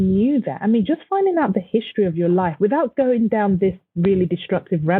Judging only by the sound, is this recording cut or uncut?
uncut